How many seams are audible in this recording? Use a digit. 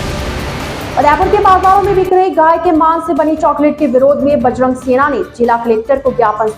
1